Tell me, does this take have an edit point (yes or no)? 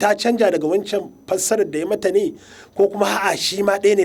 no